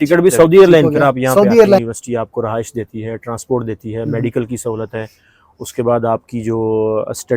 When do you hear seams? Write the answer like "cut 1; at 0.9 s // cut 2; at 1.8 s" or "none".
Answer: cut 1; at 1.8 s